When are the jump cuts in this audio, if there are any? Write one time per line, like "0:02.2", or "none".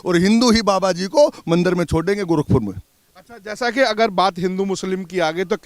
none